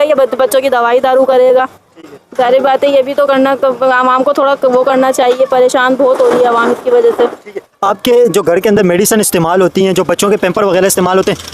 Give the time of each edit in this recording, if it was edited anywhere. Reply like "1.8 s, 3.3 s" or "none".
none